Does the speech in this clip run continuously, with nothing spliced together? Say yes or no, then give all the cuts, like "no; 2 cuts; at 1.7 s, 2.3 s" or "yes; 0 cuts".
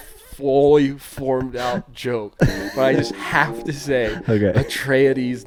yes; 0 cuts